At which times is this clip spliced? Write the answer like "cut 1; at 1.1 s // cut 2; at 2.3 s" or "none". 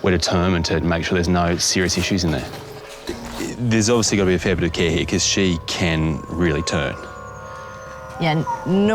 cut 1; at 3.2 s